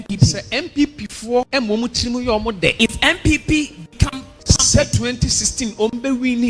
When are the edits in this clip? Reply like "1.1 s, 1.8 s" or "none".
1.5 s, 2.7 s, 4.3 s